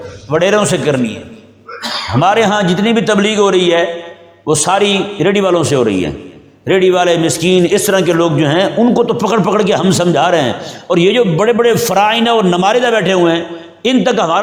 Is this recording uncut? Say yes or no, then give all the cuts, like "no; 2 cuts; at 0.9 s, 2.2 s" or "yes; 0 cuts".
yes; 0 cuts